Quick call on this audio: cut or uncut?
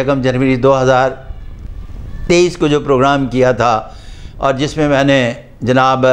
uncut